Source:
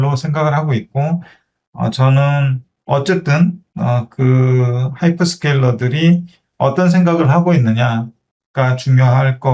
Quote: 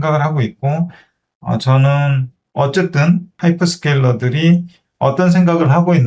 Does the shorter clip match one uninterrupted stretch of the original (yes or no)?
no